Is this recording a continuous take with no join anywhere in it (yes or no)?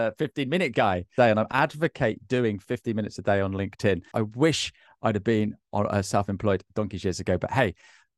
no